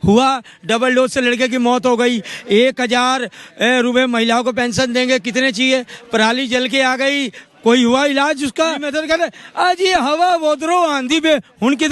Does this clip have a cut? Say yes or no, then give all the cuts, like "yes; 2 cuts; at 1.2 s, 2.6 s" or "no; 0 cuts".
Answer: yes; 1 cut; at 8.9 s